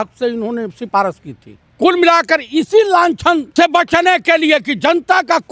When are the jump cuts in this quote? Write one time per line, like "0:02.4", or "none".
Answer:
0:01.7
0:03.5